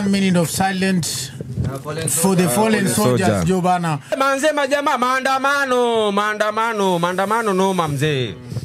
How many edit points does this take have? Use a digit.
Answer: 1